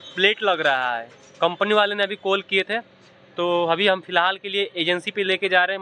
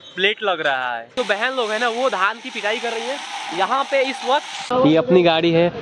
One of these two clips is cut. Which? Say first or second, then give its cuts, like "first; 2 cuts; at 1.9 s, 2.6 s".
second; 2 cuts; at 1.1 s, 4.7 s